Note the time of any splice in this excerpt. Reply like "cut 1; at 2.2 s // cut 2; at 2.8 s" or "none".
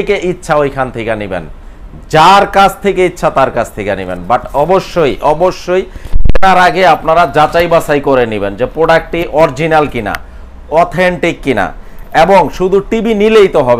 none